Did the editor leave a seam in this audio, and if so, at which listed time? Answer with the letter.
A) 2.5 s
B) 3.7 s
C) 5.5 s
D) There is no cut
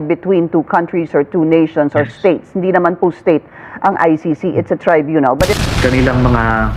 C